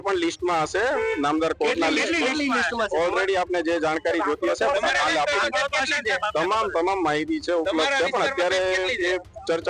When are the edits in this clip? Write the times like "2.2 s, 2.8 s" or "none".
none